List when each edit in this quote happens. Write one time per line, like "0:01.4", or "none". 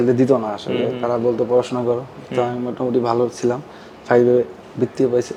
none